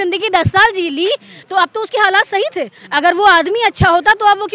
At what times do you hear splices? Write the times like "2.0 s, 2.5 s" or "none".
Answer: none